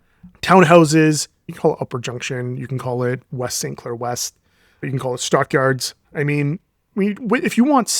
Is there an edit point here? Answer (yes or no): yes